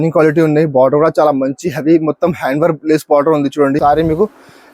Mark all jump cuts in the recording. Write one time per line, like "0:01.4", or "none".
0:03.8